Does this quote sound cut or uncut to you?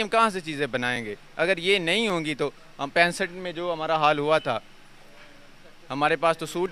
uncut